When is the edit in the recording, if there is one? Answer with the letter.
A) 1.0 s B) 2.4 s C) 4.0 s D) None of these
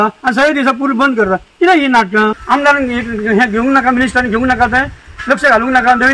B